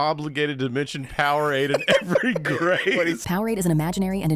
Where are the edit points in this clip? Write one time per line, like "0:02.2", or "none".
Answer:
0:03.2